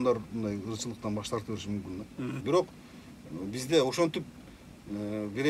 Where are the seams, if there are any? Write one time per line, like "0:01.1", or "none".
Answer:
0:02.4

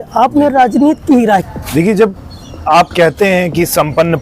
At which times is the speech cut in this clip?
0:01.4

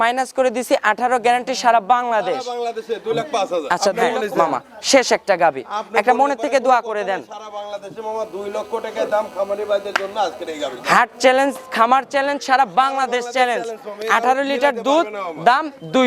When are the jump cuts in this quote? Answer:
0:04.0

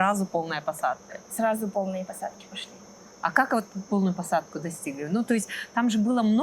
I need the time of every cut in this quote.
none

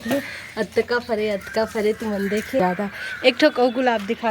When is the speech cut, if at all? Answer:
0:02.6

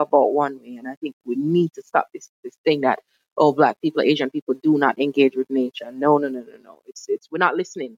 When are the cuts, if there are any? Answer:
none

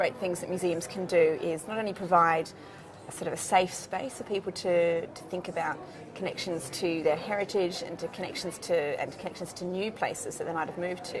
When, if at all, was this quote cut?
0:01.4

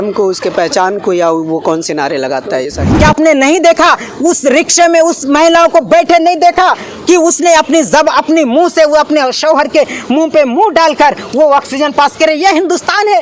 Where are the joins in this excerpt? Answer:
0:02.9

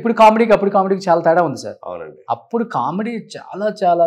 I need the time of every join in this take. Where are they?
none

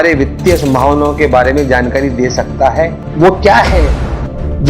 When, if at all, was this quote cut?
0:03.0

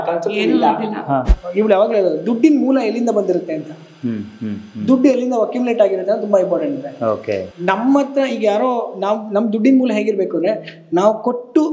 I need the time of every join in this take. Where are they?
0:01.3
0:07.5

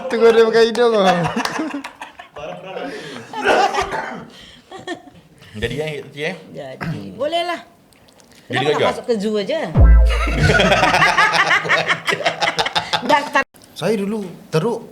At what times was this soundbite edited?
0:13.4

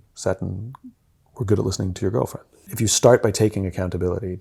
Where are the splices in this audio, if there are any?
0:02.7

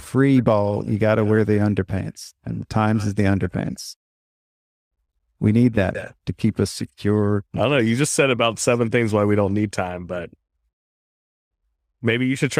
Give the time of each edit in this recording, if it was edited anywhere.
none

